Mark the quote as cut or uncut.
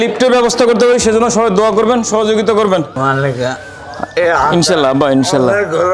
cut